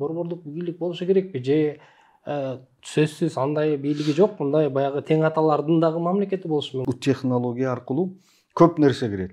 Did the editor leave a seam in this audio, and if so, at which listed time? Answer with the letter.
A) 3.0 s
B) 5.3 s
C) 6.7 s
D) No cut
C